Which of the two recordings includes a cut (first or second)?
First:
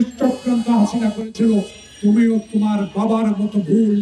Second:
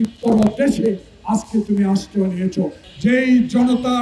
second